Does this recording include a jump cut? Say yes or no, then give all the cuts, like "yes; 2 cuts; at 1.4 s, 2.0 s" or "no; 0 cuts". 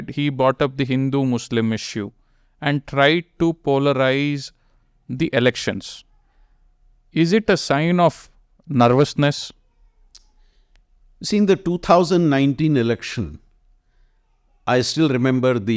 no; 0 cuts